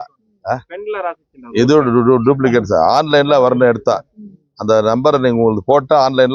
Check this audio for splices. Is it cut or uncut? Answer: uncut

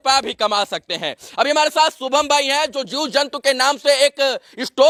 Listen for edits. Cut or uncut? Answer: uncut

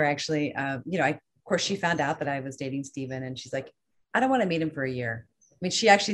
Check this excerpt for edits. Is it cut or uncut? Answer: uncut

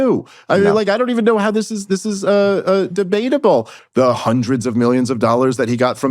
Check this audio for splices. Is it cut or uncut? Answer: cut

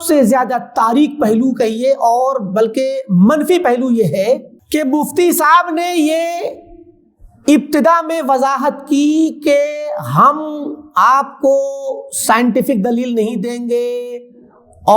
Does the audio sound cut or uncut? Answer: cut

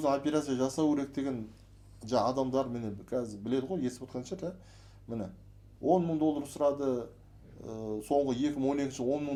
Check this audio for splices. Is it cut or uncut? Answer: uncut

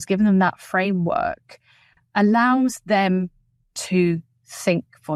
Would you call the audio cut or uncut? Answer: uncut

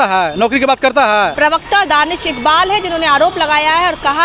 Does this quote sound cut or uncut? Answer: cut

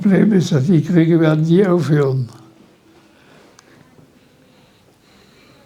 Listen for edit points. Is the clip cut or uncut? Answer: uncut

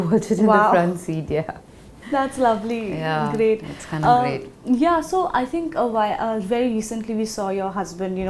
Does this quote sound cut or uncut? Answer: uncut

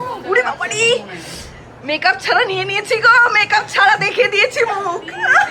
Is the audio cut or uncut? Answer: uncut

